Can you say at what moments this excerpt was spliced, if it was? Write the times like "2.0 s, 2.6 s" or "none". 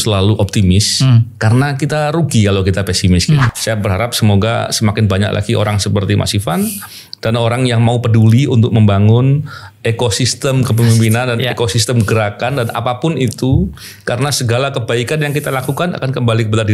3.5 s

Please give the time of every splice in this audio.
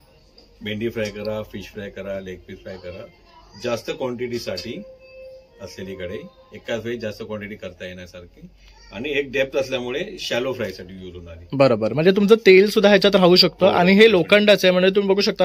none

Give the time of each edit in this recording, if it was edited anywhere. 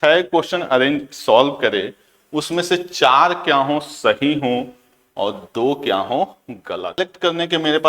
7.0 s

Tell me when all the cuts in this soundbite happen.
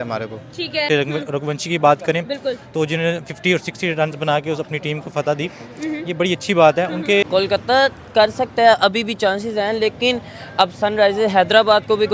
0.8 s, 7.3 s

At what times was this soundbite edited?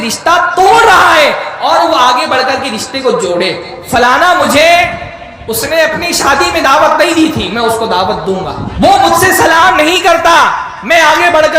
3.7 s, 8.6 s

